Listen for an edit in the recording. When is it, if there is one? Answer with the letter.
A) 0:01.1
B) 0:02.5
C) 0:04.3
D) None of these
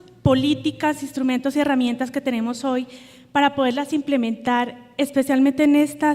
D